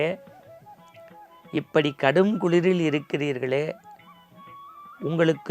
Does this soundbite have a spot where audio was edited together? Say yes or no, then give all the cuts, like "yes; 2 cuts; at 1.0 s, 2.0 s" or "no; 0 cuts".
no; 0 cuts